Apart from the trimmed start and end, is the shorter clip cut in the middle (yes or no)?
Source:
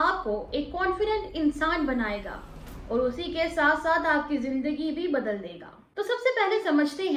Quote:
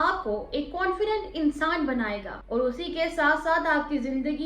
yes